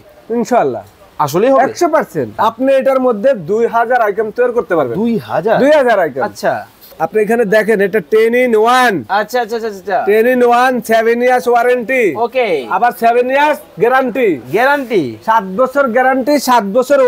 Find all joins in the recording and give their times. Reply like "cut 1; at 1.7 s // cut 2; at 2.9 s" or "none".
cut 1; at 2.4 s // cut 2; at 6.7 s